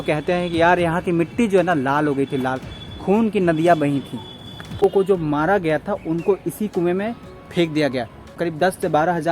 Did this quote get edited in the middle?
yes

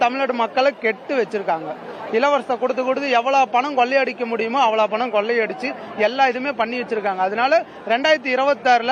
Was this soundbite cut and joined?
no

